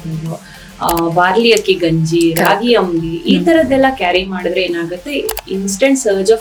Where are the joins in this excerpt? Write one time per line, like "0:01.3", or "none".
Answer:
none

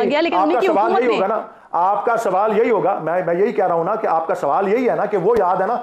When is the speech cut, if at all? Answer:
none

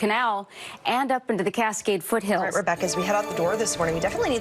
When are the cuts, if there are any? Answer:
0:02.5

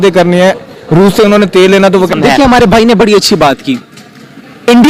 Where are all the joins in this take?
0:02.1

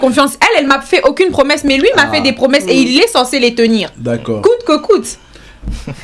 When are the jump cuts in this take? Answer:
none

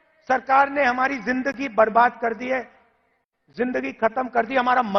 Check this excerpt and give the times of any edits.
none

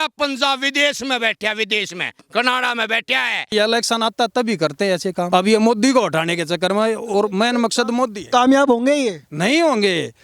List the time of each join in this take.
0:03.5
0:05.3

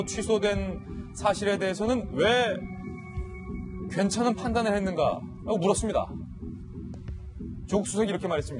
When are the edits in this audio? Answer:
none

